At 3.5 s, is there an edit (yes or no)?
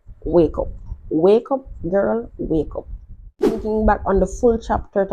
yes